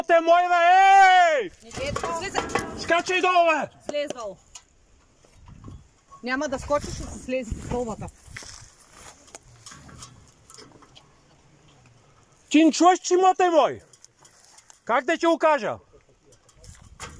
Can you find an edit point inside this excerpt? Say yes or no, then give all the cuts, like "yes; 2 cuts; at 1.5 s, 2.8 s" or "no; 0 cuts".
no; 0 cuts